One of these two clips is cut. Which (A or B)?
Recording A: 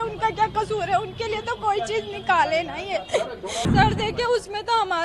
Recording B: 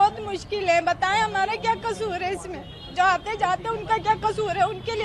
A